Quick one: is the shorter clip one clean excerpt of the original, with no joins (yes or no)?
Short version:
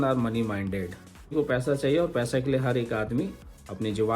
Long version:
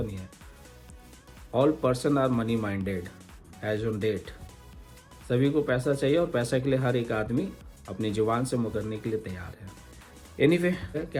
no